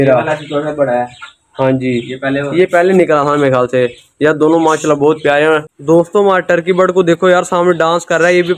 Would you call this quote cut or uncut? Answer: cut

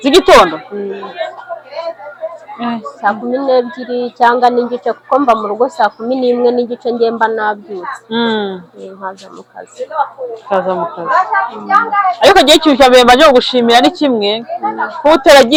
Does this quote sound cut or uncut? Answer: uncut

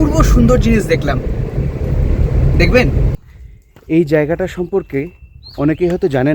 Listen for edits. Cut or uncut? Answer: cut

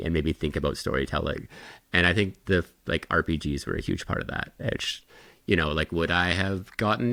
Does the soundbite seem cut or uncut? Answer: uncut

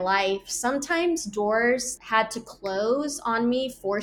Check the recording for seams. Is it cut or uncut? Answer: cut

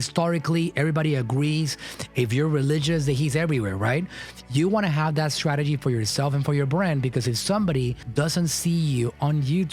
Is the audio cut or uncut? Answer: cut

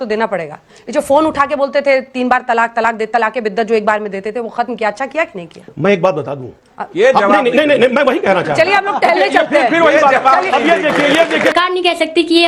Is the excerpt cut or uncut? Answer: cut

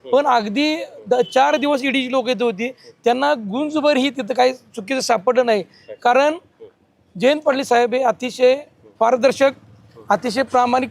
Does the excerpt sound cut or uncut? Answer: uncut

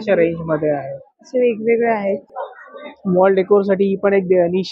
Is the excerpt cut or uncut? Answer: cut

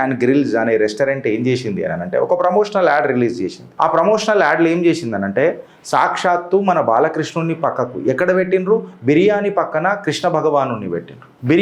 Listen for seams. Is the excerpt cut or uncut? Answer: uncut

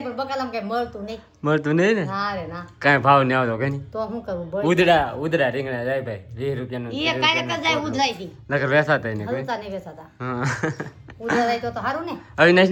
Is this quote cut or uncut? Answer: uncut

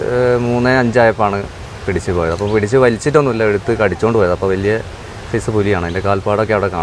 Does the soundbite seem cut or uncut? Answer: uncut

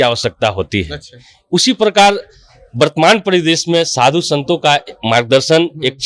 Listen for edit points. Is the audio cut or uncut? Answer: uncut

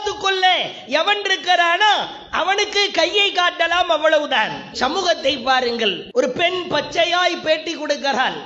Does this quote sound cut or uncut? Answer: cut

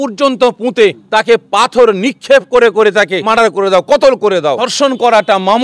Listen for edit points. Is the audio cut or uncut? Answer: cut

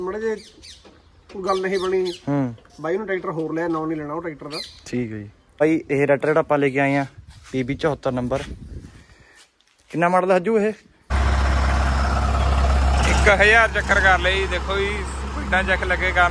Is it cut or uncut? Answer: cut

